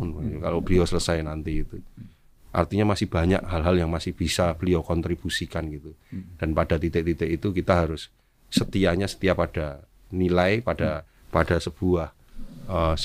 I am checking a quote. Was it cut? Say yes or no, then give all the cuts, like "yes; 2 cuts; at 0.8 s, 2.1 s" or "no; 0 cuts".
no; 0 cuts